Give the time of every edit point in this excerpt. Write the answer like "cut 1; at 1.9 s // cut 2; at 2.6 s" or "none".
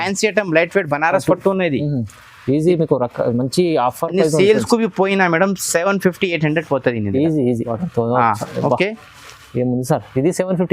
cut 1; at 7.8 s